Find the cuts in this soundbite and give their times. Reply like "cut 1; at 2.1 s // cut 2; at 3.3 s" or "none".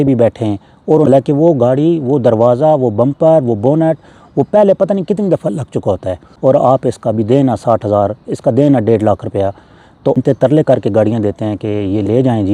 cut 1; at 1.1 s // cut 2; at 6.2 s // cut 3; at 10.2 s